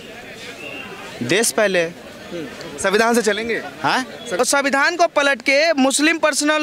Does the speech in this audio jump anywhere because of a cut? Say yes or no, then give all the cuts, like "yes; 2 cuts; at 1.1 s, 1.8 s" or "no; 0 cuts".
yes; 1 cut; at 4.4 s